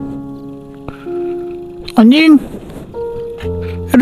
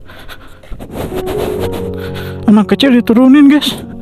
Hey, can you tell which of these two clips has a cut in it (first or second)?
first